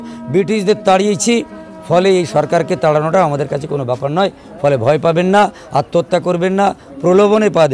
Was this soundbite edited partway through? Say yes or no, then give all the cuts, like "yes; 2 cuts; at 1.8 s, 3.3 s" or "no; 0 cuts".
no; 0 cuts